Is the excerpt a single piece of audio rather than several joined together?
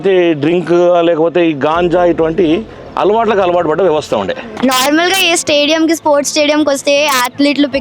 no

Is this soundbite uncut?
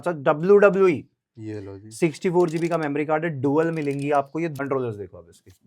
no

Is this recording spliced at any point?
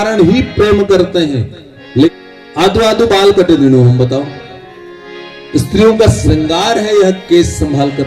yes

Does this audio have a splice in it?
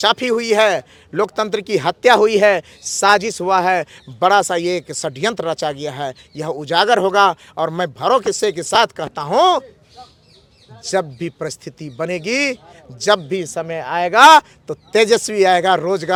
no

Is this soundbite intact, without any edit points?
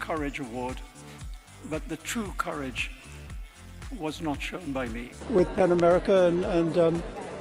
yes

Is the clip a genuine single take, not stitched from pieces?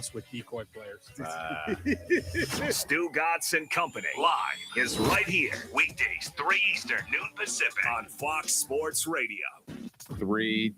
no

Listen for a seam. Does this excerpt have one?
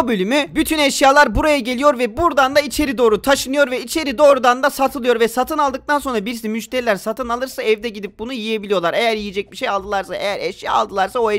no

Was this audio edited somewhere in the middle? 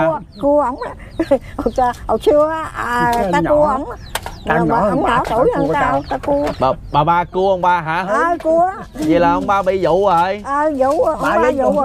no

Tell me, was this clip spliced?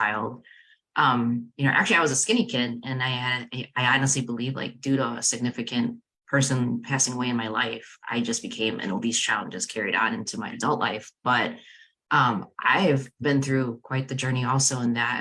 no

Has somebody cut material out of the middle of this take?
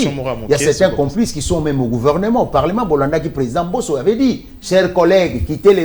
no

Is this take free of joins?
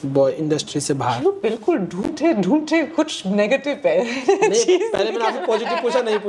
yes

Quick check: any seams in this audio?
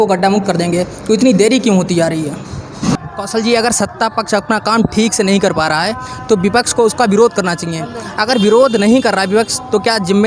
yes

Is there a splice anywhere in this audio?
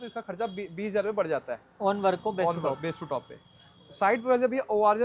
no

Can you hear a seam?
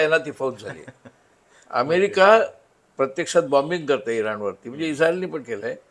no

